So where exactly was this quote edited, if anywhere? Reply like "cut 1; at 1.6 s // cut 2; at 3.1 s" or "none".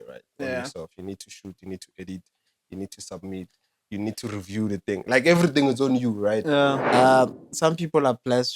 cut 1; at 6.8 s